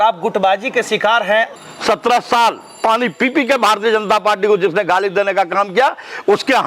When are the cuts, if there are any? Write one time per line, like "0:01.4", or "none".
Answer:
0:01.5